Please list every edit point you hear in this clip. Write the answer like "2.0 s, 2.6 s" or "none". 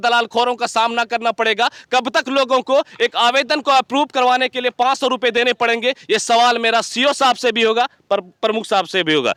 none